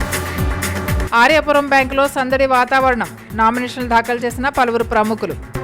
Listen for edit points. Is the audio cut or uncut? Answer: cut